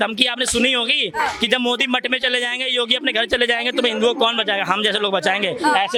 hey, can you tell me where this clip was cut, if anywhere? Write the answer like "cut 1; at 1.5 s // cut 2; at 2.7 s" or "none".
none